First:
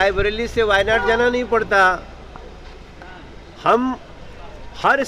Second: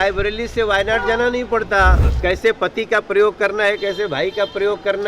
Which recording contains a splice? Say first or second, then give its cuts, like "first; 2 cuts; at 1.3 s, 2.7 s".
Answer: second; 1 cut; at 2.1 s